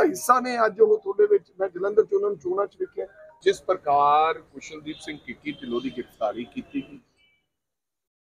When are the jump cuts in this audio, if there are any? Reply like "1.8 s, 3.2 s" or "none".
3.4 s